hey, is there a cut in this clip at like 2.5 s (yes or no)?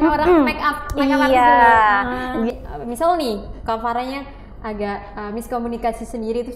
yes